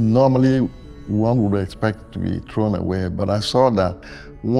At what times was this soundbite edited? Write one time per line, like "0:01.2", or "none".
0:03.2